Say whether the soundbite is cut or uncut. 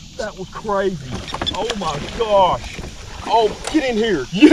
uncut